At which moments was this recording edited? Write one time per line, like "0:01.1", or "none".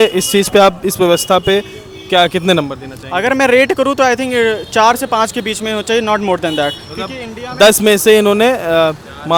none

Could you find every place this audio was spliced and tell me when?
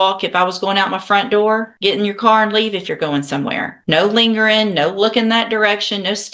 none

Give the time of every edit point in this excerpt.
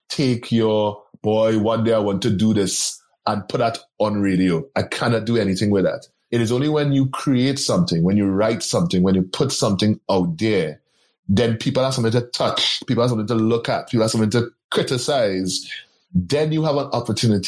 none

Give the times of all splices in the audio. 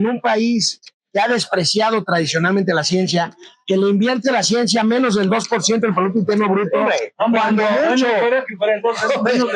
none

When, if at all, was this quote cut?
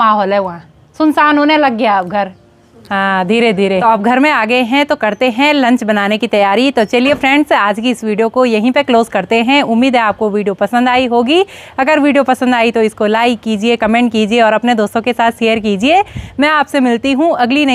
none

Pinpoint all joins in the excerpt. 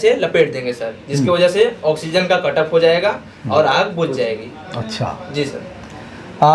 none

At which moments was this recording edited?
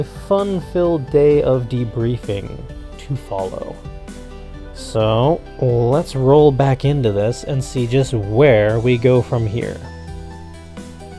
0:09.1

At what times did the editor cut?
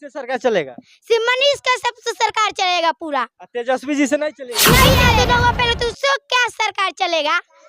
0:04.9

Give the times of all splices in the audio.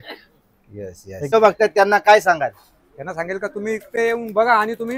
0:01.3

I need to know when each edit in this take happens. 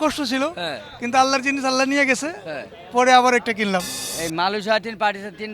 0:04.0

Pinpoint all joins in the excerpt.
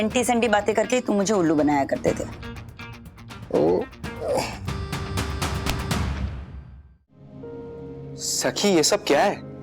0:07.3

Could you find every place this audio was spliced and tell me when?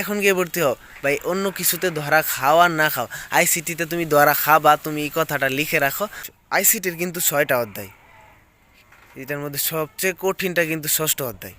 0:06.2

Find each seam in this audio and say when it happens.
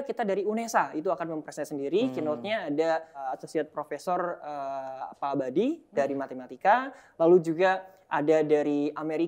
0:03.2

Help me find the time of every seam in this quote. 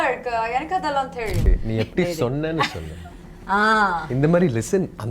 0:01.5

